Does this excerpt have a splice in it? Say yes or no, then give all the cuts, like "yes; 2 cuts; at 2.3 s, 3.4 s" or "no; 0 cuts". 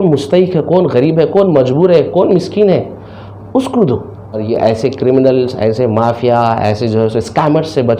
yes; 1 cut; at 4.4 s